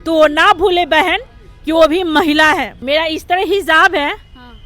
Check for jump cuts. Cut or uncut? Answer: cut